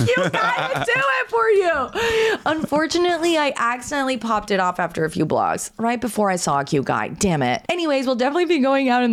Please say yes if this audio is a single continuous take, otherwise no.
yes